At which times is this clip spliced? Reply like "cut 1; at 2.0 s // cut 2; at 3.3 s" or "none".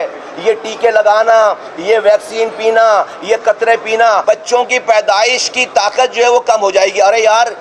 cut 1; at 4.2 s